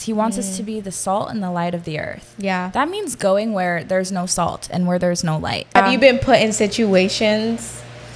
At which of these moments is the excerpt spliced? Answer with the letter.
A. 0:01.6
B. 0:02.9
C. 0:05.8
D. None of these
C